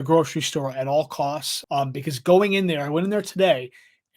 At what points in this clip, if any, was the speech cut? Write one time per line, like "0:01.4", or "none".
0:01.5